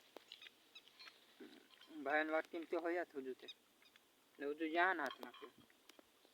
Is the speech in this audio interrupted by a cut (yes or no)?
no